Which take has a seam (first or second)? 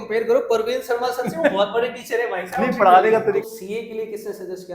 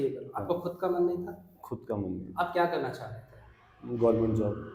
first